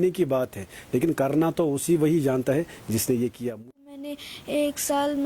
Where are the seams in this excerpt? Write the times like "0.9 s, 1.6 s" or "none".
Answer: 3.6 s